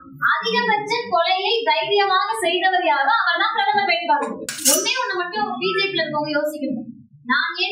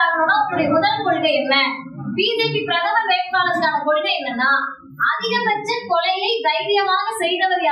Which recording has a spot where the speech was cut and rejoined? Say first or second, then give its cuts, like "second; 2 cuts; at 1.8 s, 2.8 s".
first; 1 cut; at 4.5 s